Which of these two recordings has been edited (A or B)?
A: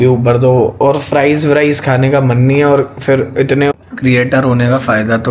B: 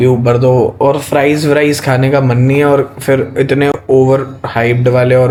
A